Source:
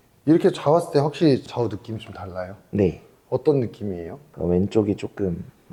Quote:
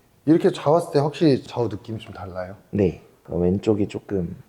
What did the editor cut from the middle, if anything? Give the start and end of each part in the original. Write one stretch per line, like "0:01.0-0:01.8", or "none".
0:03.1-0:04.2